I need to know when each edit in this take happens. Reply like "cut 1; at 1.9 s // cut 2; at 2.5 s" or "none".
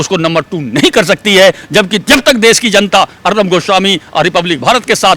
none